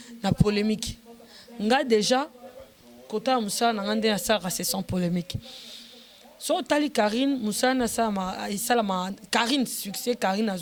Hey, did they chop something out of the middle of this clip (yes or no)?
no